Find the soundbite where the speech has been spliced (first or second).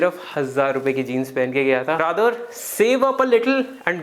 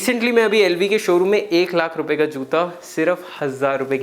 first